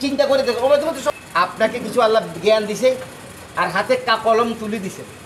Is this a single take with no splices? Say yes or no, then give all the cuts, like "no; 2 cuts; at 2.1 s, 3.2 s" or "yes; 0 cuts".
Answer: no; 1 cut; at 1.1 s